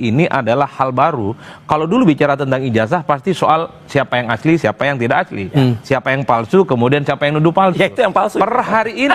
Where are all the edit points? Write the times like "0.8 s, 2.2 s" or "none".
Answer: none